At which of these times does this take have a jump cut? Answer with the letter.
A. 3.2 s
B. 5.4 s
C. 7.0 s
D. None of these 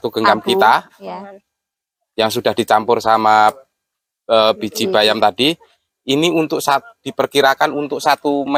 D